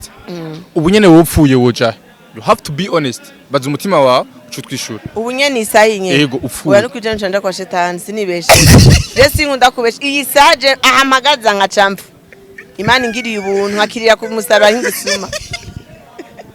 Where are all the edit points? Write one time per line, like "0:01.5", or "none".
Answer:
none